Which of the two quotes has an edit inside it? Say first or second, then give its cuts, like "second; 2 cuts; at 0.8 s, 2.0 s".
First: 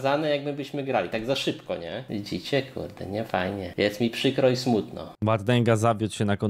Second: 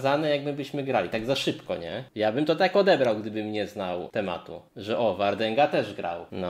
first; 1 cut; at 2.0 s